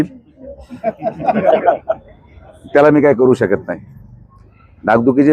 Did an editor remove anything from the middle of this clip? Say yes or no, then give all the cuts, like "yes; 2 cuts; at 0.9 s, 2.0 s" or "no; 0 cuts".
no; 0 cuts